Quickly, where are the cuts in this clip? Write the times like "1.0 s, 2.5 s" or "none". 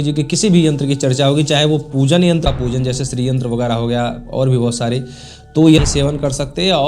2.4 s, 5.8 s